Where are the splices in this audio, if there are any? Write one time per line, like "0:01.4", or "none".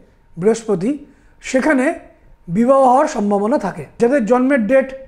0:03.8